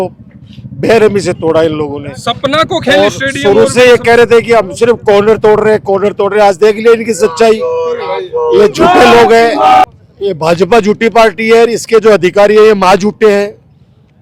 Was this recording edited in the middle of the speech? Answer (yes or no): no